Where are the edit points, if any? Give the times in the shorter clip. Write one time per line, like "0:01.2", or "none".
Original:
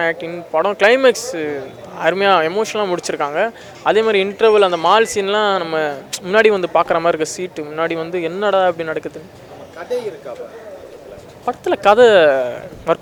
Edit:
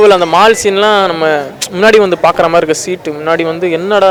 none